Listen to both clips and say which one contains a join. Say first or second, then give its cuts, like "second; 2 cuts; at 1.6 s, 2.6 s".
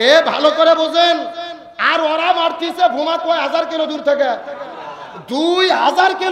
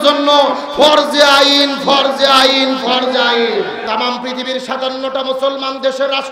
second; 1 cut; at 3.8 s